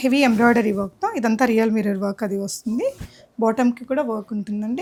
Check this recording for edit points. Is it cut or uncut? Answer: uncut